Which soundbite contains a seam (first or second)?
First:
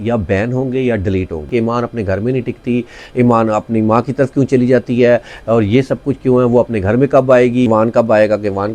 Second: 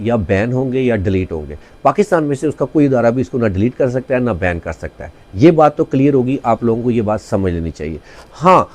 first